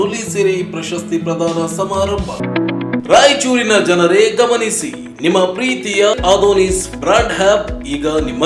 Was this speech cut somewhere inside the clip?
yes; 1 cut; at 2.4 s

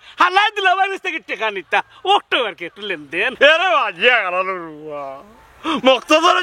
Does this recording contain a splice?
no; 0 cuts

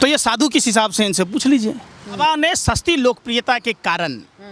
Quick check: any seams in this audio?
yes; 1 cut; at 2.1 s

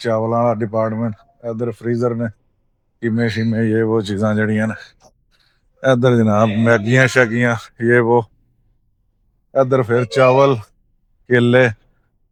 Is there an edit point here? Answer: no; 0 cuts

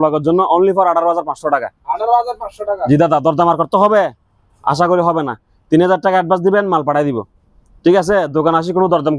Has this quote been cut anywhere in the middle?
no; 0 cuts

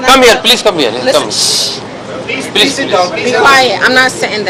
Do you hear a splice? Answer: no; 0 cuts

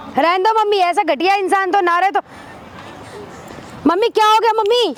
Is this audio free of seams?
yes; 0 cuts

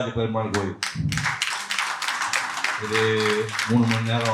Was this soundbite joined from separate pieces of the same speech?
no; 0 cuts

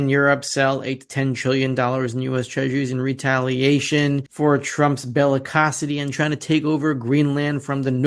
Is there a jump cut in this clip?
no; 0 cuts

